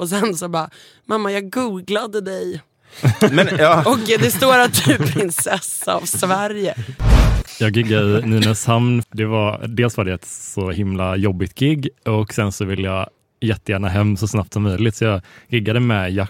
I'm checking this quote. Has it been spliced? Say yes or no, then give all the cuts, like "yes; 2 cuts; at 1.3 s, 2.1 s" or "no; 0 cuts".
yes; 2 cuts; at 7.3 s, 9.0 s